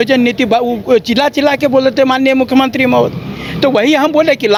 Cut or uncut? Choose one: uncut